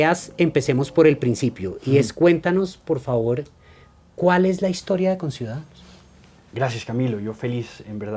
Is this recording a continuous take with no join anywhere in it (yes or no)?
yes